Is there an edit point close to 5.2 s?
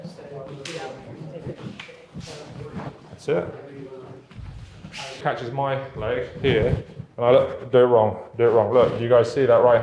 yes; 1 cut; at 5.2 s

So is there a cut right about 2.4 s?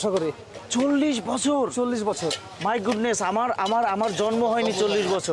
no; 0 cuts

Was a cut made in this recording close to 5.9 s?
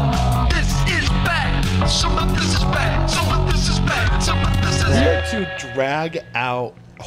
no; 0 cuts

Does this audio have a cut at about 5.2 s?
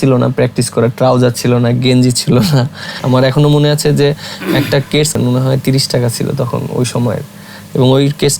yes; 2 cuts; at 2.9 s, 5.2 s

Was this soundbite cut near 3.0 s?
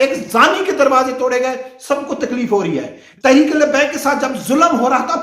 yes; 1 cut; at 3.0 s

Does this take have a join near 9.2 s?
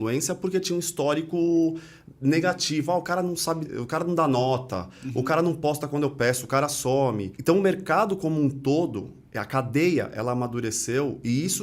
no; 2 cuts; at 3.7 s, 7.3 s

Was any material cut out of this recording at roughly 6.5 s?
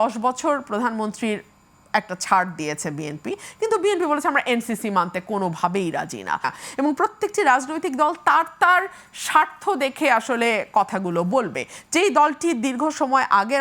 yes; 1 cut; at 6.5 s

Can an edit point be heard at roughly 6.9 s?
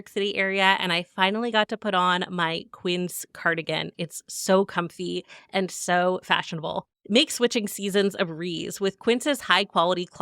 yes; 2 cuts; at 3.9 s, 6.9 s

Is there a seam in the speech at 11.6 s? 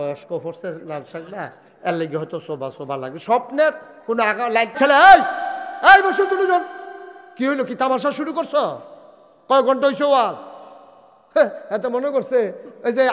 no; 1 cut; at 4.8 s

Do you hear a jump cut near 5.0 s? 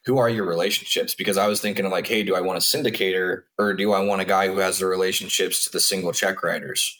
no; 1 cut; at 3.4 s

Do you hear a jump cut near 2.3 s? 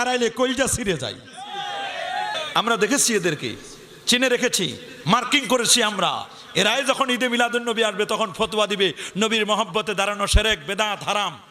yes; 1 cut; at 2.3 s

